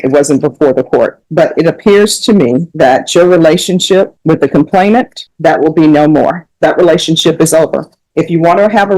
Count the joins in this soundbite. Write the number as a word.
five